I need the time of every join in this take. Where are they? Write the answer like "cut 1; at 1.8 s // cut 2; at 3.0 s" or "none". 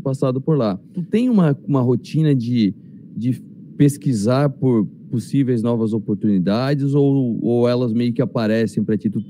cut 1; at 0.9 s